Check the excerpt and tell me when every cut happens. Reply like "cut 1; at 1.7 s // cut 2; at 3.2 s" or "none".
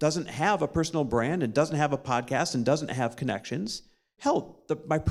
cut 1; at 4.1 s